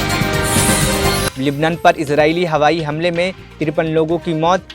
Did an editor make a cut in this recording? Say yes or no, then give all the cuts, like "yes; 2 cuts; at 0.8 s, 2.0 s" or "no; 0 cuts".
yes; 1 cut; at 1.3 s